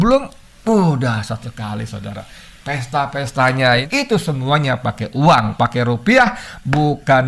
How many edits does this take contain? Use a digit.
1